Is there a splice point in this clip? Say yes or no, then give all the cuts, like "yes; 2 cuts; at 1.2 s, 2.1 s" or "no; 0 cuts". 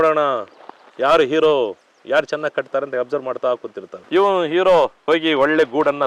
no; 0 cuts